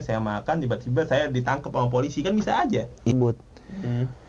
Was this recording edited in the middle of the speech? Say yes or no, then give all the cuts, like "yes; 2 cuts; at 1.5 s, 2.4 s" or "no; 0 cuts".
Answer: yes; 1 cut; at 3.1 s